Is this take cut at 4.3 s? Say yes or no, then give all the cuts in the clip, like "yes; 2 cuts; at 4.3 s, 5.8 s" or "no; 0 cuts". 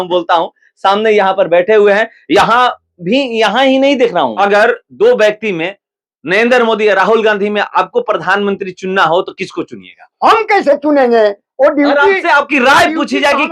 yes; 1 cut; at 4.3 s